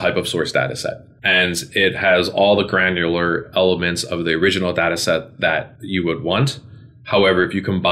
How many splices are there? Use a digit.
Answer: 2